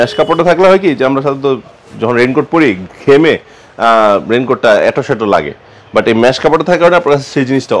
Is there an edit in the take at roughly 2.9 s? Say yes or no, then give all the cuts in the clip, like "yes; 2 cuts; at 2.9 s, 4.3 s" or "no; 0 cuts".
no; 0 cuts